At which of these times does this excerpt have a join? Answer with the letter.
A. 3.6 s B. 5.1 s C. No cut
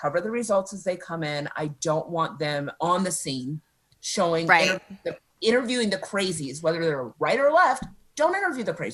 C